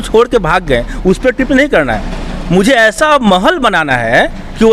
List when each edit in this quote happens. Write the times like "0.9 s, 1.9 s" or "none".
none